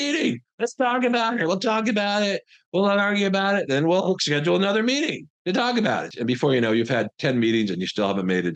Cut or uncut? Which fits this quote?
cut